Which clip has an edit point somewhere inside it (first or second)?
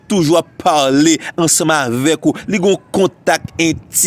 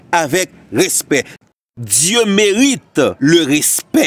second